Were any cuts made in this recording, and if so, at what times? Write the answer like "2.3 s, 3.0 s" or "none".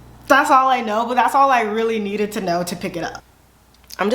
3.2 s

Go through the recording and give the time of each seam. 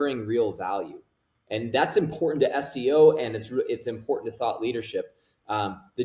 none

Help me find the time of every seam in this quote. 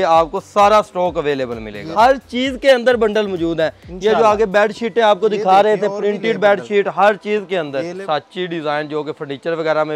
1.9 s, 8.0 s

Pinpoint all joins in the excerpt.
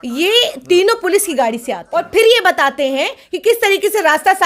1.7 s

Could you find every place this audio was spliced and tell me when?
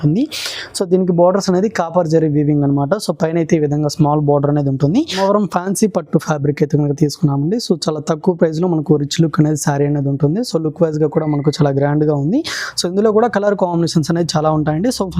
5.1 s

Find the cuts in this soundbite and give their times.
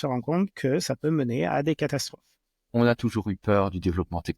2.6 s

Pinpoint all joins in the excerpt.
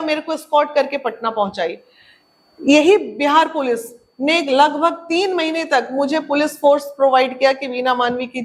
none

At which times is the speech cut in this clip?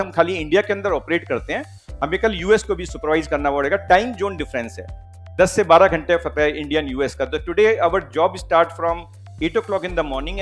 none

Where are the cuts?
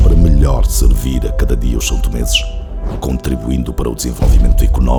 none

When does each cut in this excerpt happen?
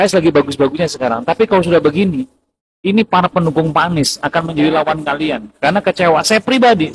none

